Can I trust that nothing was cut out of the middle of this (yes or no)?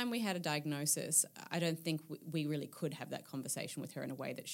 yes